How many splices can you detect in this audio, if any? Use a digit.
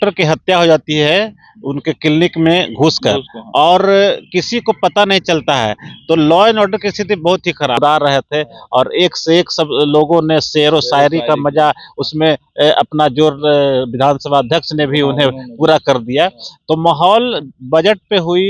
1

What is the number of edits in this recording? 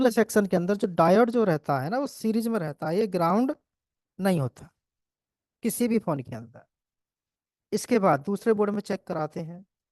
0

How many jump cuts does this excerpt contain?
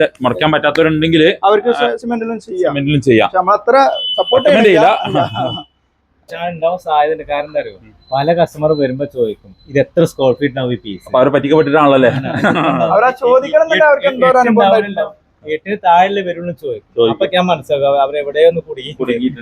1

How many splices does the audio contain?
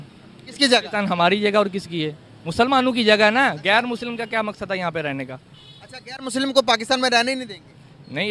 1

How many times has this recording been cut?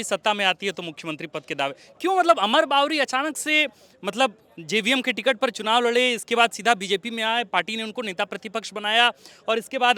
0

